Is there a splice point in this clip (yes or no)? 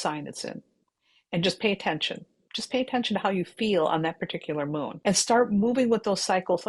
yes